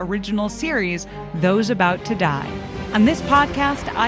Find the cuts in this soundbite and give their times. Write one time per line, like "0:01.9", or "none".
0:02.8